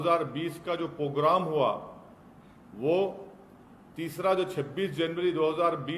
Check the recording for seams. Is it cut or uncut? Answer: uncut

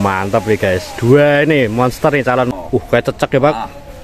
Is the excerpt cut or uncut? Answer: cut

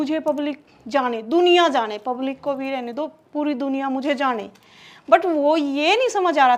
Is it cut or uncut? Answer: uncut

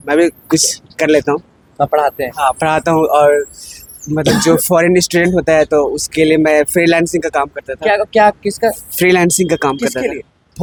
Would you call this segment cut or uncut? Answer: uncut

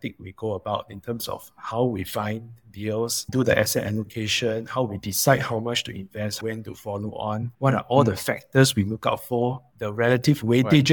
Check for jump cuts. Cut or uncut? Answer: cut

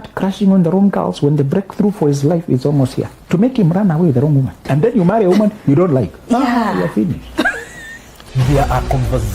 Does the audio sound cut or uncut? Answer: cut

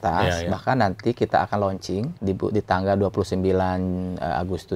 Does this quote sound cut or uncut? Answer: cut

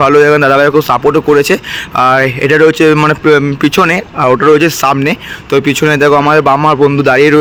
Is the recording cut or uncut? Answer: uncut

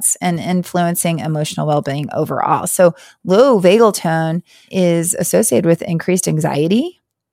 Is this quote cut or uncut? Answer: cut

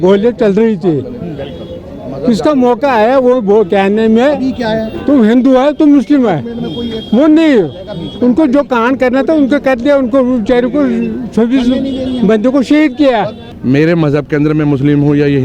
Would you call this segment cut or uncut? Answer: cut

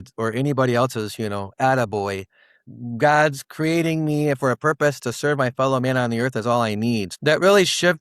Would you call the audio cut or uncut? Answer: cut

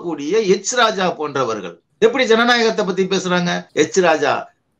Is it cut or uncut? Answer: cut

